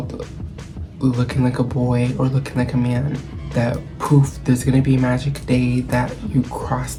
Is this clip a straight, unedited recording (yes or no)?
yes